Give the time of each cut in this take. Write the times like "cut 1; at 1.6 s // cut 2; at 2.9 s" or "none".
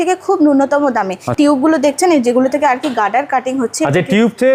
none